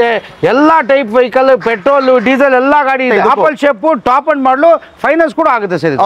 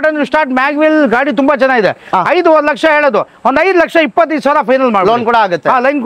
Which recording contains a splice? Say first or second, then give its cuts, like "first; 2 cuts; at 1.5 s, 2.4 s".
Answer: first; 1 cut; at 3.1 s